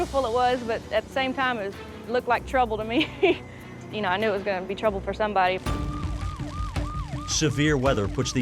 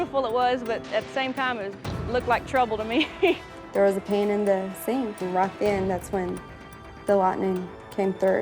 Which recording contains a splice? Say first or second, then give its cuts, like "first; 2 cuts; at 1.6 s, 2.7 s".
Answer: second; 2 cuts; at 3.5 s, 5.2 s